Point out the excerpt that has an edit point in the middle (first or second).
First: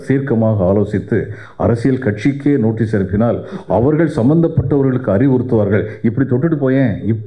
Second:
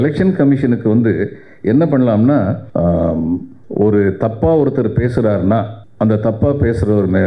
second